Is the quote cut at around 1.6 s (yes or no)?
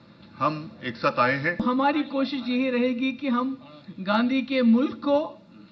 yes